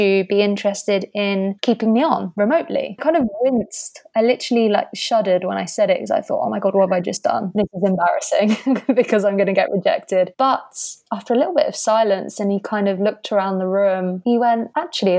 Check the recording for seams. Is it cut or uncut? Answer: uncut